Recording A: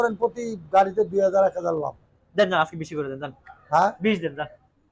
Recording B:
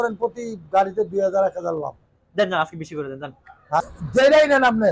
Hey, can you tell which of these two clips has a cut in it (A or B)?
B